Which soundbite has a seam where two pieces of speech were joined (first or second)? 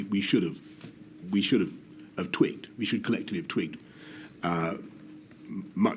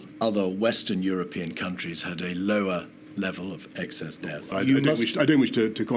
second